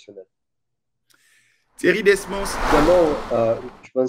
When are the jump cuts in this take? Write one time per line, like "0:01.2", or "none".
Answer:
0:02.6